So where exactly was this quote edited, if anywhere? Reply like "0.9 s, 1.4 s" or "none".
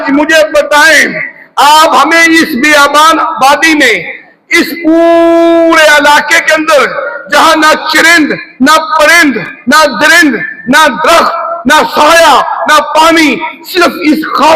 none